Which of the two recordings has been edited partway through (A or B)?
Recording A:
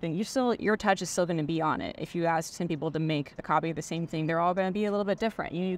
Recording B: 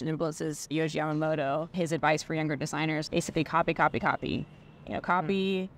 B